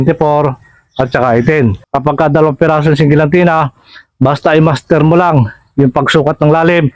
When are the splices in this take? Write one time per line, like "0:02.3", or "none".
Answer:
0:01.8